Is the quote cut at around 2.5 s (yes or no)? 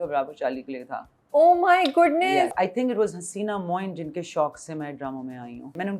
yes